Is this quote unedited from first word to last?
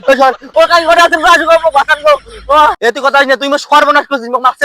no; 1 cut; at 2.8 s

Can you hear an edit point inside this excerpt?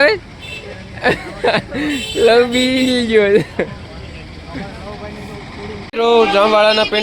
yes; 1 cut; at 5.8 s

